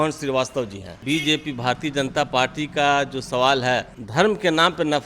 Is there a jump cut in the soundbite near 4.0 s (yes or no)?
yes